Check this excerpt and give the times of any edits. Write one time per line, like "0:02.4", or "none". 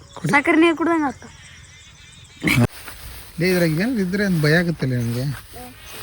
0:02.6